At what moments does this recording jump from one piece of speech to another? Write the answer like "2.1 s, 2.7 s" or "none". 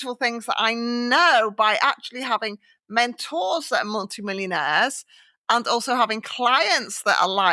none